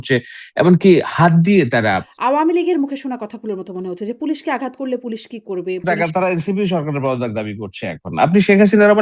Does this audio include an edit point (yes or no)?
yes